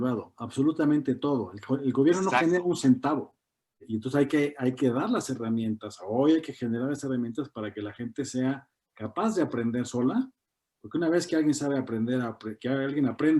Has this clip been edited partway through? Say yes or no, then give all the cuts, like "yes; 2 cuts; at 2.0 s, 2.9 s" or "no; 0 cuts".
yes; 1 cut; at 3.9 s